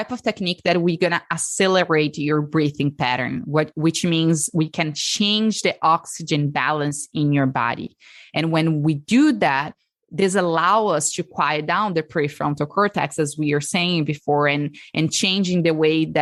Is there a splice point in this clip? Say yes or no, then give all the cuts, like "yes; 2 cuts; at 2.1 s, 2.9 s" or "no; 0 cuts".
no; 0 cuts